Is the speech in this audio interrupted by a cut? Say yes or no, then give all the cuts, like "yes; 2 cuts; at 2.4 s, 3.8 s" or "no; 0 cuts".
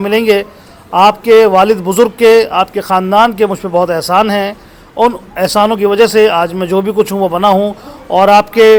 no; 0 cuts